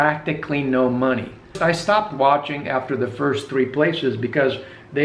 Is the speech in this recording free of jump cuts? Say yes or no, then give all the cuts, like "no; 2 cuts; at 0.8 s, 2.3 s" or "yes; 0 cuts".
no; 1 cut; at 1.6 s